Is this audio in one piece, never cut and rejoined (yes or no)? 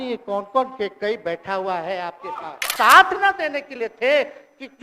no